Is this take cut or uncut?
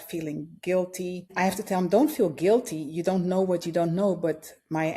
cut